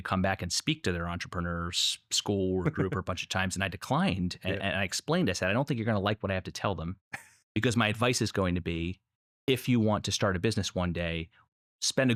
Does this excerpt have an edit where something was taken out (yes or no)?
no